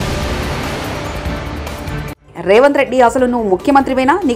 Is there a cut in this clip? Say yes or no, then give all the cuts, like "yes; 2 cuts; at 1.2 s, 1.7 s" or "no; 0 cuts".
no; 0 cuts